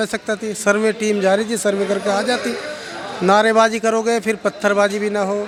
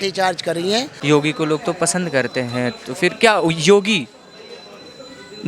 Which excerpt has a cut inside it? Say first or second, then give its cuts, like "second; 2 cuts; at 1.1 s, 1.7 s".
second; 1 cut; at 0.9 s